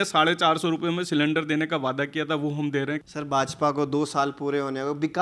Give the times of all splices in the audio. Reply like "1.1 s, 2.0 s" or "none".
3.0 s